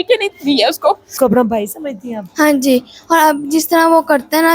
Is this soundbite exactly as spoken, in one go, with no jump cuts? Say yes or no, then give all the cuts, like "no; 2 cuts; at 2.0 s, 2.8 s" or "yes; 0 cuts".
no; 1 cut; at 1.1 s